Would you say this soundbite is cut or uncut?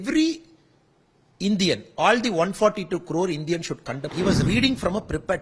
cut